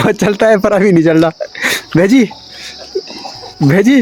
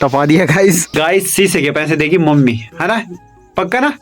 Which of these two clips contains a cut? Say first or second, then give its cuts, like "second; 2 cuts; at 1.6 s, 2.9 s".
second; 1 cut; at 0.9 s